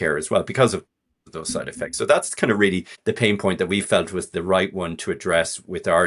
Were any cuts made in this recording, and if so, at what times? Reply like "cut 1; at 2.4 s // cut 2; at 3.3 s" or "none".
none